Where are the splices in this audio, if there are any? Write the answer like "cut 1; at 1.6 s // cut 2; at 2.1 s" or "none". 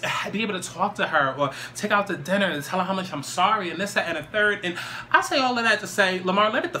none